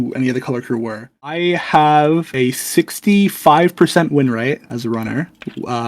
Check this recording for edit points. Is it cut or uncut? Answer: cut